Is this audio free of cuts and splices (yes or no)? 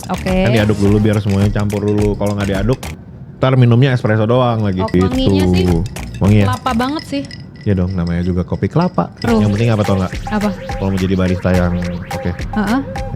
no